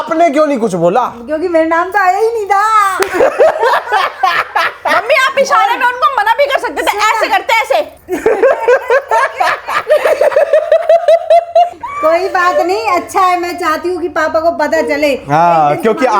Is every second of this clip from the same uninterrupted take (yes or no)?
yes